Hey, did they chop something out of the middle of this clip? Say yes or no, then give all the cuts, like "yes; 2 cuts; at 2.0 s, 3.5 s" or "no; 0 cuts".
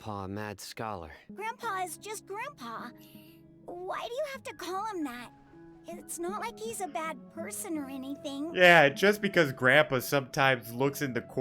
yes; 1 cut; at 1.2 s